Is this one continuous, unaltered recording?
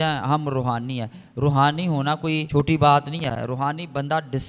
no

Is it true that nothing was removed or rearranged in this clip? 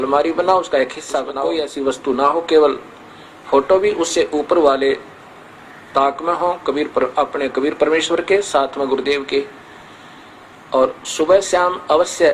no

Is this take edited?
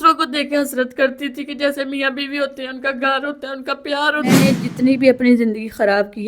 yes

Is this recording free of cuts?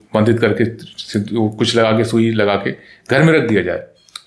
yes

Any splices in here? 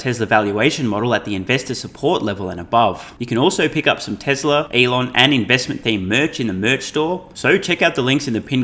yes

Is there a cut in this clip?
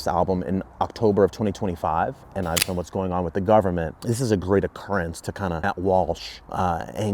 yes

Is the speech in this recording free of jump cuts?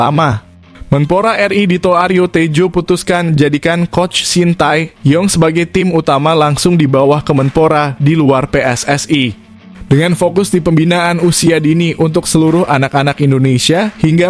yes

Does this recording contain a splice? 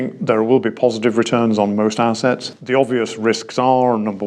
yes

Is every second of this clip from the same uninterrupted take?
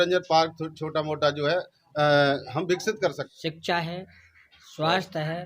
no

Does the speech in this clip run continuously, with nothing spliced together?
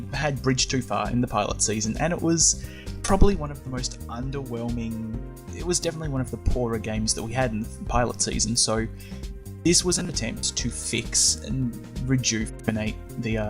no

